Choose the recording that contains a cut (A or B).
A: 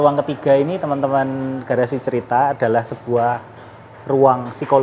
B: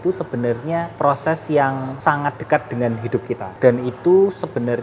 B